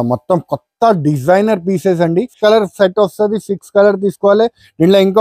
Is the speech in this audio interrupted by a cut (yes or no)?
yes